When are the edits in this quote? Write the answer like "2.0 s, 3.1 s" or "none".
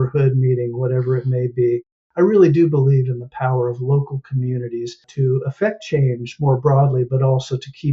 5.0 s